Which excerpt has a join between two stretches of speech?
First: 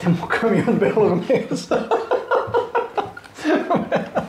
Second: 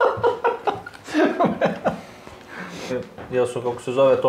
second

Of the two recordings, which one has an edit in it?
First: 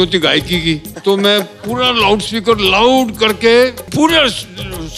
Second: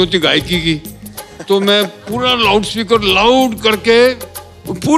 first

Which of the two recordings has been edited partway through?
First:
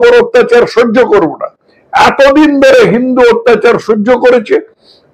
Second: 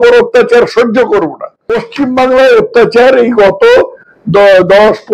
second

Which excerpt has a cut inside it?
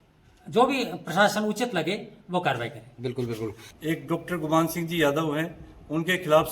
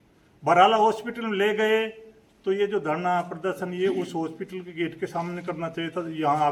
first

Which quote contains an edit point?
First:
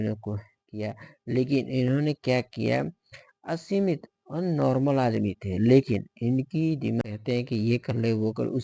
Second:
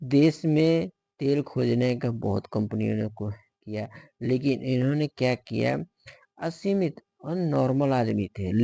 first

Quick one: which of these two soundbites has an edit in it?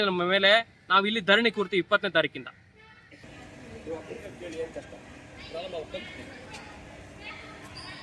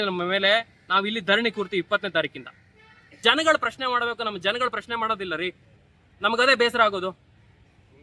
second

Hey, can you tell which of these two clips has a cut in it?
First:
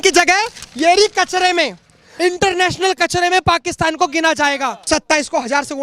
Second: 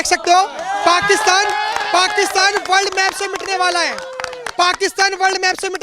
first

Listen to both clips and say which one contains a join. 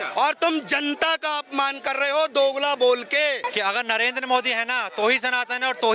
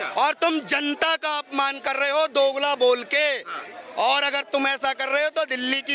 first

